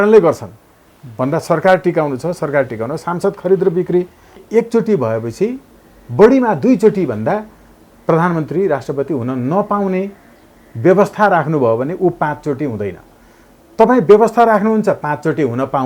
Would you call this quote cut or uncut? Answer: cut